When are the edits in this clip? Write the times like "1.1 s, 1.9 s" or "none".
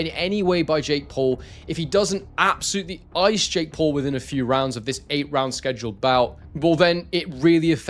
none